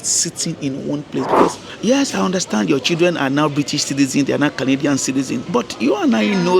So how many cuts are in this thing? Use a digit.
2